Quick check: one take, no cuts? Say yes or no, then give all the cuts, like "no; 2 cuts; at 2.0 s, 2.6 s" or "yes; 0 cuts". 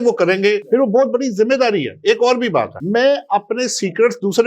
yes; 0 cuts